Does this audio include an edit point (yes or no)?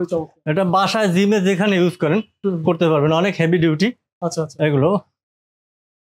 no